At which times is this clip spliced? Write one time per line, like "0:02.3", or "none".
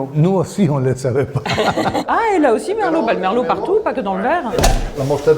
0:02.0
0:04.5